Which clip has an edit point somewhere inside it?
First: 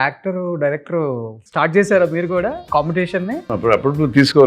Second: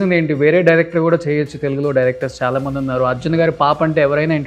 first; 3 cuts; at 1.4 s, 2.6 s, 3.5 s

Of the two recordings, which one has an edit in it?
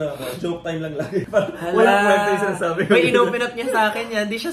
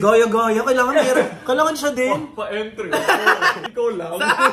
second; 1 cut; at 3.6 s

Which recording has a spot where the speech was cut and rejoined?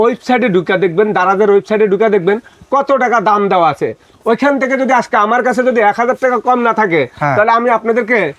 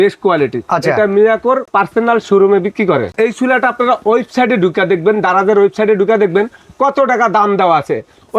second; 2 cuts; at 1.7 s, 3.1 s

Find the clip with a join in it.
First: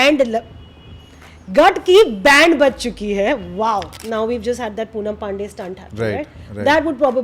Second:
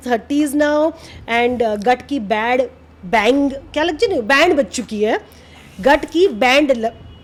first; 1 cut; at 3.9 s

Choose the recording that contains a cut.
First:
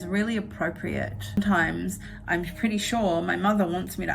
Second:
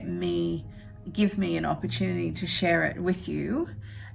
first; 1 cut; at 1.4 s

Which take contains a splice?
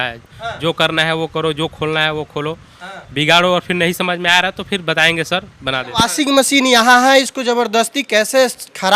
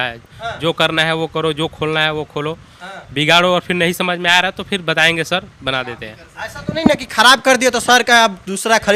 first; 1 cut; at 5.9 s

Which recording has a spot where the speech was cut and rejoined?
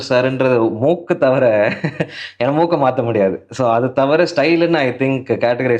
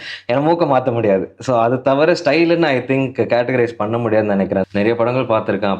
second; 1 cut; at 4.7 s

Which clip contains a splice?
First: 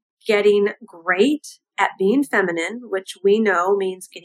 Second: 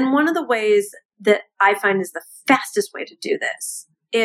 second; 1 cut; at 1.0 s

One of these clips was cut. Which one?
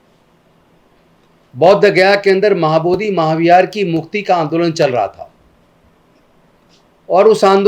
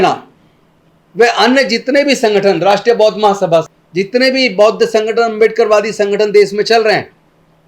second; 1 cut; at 3.7 s

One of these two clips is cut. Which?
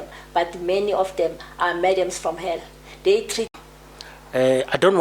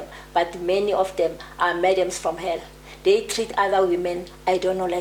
first; 1 cut; at 3.5 s

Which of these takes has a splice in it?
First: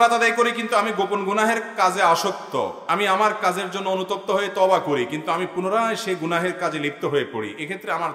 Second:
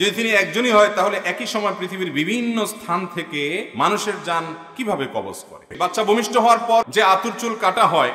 second; 2 cuts; at 5.7 s, 6.9 s

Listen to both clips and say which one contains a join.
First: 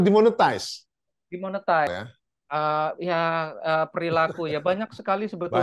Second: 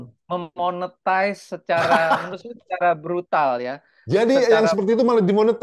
first; 1 cut; at 1.9 s

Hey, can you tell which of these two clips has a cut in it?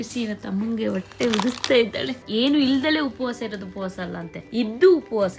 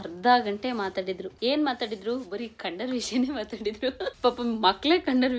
first; 1 cut; at 2.2 s

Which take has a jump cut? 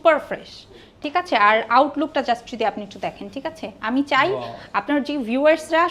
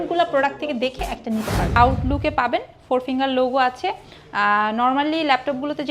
second; 1 cut; at 1.8 s

